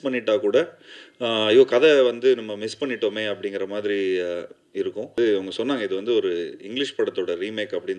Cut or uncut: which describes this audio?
cut